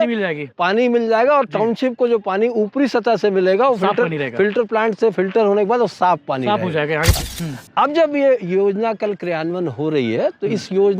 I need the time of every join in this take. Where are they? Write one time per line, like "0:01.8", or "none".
0:07.2